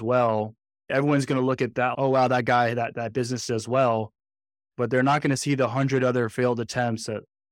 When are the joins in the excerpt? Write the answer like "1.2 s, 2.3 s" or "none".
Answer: none